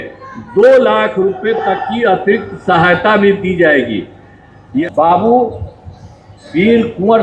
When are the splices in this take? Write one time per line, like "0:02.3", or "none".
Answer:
0:04.8